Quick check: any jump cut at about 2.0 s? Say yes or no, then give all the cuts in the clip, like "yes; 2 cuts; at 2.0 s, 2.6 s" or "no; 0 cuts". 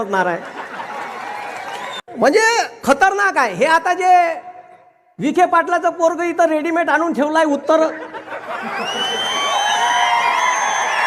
yes; 1 cut; at 2.0 s